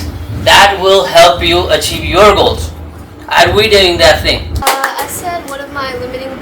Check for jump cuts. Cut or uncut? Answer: cut